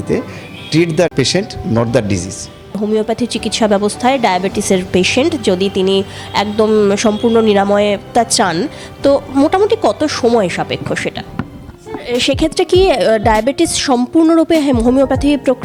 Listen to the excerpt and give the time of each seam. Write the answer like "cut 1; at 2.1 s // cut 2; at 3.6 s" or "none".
cut 1; at 1.1 s // cut 2; at 2.8 s // cut 3; at 11.7 s